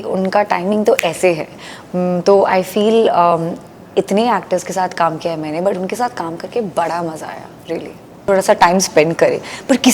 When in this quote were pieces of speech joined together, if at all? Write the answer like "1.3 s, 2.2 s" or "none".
8.2 s

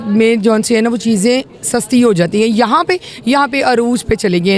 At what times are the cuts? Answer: none

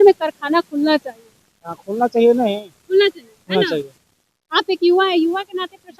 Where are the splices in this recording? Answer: none

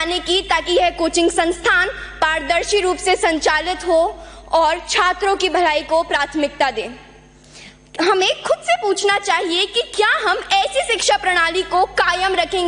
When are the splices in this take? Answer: none

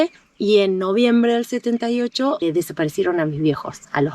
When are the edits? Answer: 2.4 s

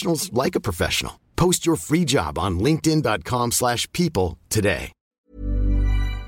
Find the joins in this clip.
5.3 s

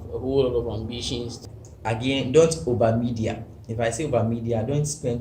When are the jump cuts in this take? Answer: 1.4 s

